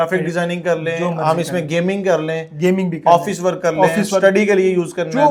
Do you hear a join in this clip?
no; 0 cuts

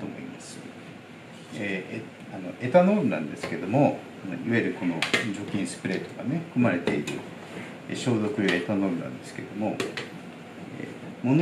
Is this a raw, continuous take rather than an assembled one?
yes; 0 cuts

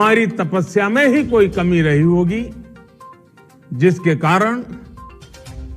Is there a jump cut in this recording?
yes; 1 cut; at 4.8 s

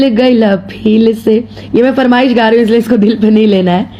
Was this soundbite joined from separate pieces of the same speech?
no; 0 cuts

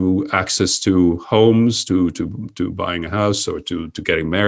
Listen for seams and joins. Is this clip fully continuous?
yes; 0 cuts

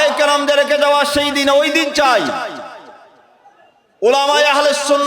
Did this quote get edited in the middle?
no; 0 cuts

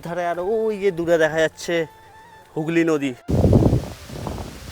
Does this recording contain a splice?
yes; 1 cut; at 3.2 s

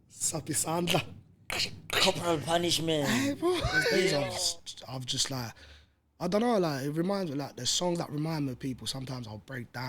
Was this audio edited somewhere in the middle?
yes; 1 cut; at 4.3 s

